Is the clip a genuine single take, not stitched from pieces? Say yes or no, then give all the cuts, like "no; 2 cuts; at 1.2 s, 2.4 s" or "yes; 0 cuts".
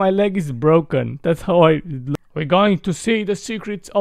no; 1 cut; at 2.0 s